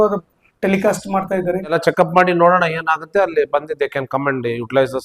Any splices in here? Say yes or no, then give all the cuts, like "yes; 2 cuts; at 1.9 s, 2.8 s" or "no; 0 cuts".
yes; 1 cut; at 1.8 s